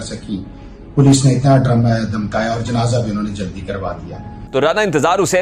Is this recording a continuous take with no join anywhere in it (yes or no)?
yes